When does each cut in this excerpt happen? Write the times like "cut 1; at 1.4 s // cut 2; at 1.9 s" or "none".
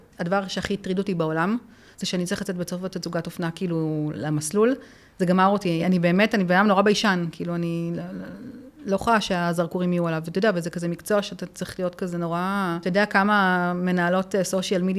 cut 1; at 5.8 s // cut 2; at 12.8 s